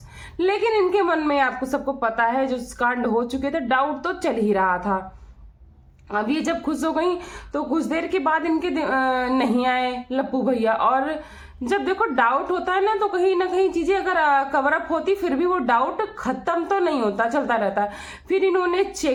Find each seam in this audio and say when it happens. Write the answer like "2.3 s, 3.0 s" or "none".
none